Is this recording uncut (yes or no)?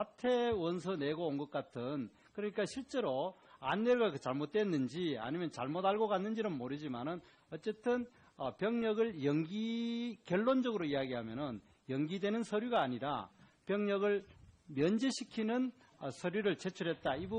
no